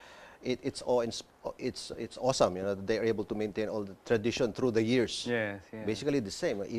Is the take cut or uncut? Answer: uncut